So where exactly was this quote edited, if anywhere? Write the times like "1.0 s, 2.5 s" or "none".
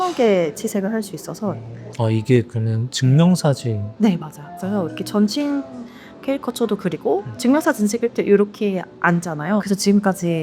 1.8 s, 9.6 s